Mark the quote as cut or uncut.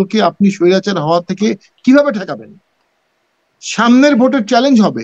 uncut